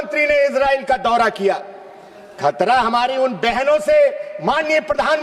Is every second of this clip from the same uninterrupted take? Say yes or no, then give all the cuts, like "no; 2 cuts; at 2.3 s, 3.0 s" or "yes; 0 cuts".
yes; 0 cuts